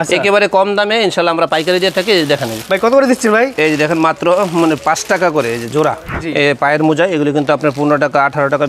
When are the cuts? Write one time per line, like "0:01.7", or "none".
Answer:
0:06.1